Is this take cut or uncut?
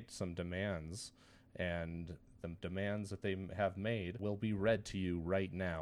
cut